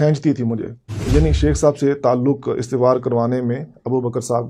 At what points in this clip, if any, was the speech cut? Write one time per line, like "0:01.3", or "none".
0:01.0